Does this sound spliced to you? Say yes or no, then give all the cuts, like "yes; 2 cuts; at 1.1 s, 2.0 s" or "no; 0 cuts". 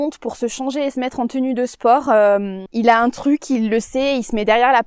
yes; 1 cut; at 2.6 s